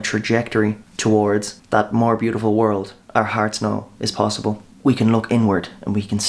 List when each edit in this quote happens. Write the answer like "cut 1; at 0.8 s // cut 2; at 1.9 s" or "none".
cut 1; at 0.9 s // cut 2; at 1.6 s // cut 3; at 4.7 s